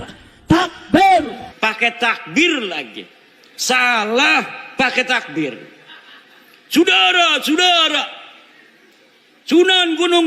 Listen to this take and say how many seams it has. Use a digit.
1